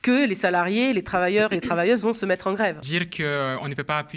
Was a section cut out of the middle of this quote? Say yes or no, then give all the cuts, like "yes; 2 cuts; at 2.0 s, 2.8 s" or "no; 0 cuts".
yes; 1 cut; at 2.8 s